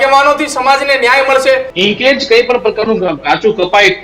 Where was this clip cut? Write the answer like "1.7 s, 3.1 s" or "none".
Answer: 1.7 s